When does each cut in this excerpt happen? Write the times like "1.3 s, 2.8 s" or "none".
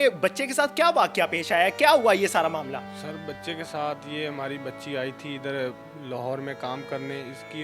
none